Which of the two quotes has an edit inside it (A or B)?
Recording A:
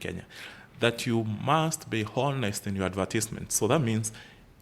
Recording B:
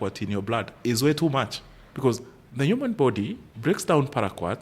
B